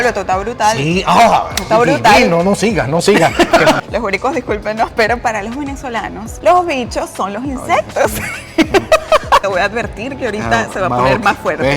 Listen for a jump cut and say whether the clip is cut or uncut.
cut